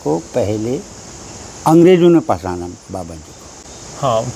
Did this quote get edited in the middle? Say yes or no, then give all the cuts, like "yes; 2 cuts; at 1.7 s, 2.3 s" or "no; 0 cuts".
no; 0 cuts